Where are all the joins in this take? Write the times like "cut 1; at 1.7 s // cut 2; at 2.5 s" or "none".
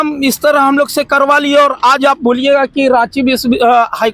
none